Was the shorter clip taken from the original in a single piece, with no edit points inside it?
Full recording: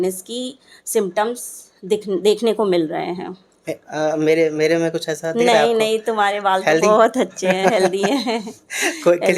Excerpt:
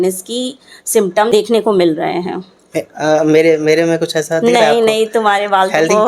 no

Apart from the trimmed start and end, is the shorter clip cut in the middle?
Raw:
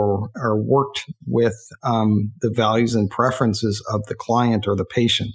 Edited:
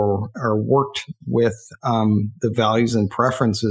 no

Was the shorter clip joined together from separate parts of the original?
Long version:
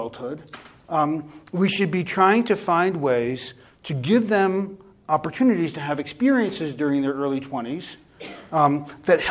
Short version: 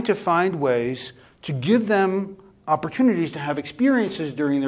no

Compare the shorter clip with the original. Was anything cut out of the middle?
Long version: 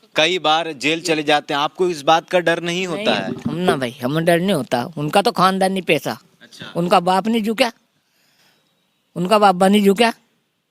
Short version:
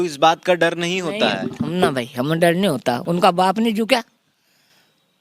yes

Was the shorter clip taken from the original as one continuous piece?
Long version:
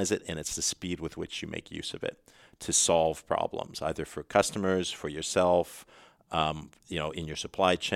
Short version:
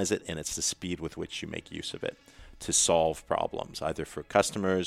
yes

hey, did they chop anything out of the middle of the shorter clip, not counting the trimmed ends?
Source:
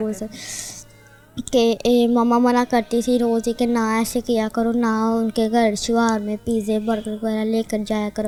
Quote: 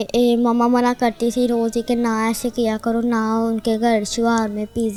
no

